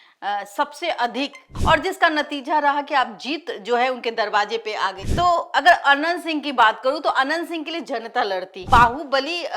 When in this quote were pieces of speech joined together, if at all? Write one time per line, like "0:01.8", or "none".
0:01.5
0:05.0
0:08.6